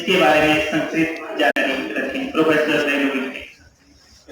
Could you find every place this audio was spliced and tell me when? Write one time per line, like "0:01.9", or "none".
0:01.5